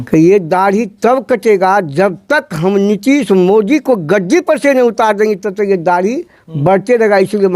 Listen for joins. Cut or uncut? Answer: uncut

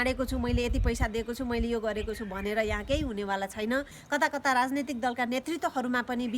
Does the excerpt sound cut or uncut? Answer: cut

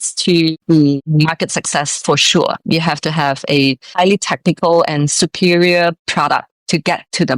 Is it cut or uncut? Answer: cut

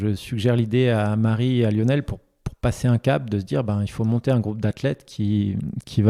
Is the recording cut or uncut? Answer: uncut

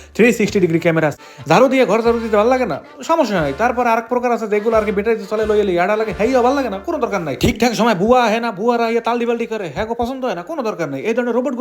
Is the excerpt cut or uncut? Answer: cut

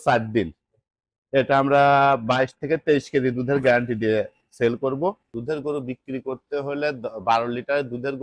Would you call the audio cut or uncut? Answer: cut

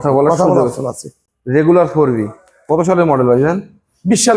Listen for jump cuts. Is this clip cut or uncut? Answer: uncut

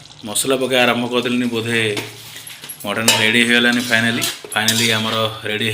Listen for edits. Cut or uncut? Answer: cut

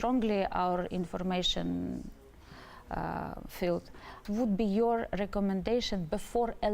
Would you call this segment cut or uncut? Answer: cut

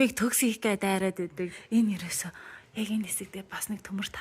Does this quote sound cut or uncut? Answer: cut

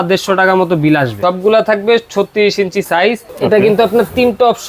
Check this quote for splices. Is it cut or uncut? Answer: cut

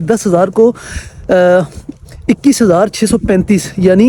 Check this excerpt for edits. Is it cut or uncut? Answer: uncut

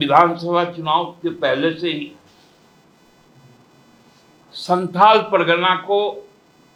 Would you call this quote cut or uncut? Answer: uncut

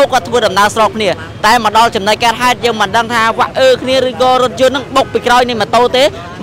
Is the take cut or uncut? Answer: uncut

